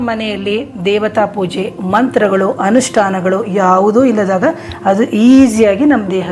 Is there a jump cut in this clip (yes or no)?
no